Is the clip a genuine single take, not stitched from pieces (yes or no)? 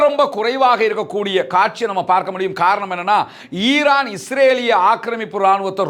yes